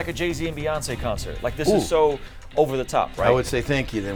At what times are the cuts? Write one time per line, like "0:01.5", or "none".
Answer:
none